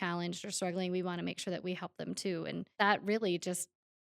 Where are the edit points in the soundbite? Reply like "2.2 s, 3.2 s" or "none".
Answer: 2.7 s